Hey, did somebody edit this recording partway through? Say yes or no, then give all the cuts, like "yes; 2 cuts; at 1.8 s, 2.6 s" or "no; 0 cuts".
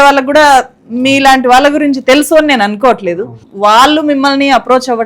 yes; 1 cut; at 3.3 s